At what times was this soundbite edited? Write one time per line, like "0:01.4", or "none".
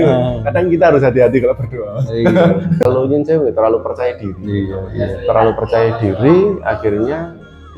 0:02.8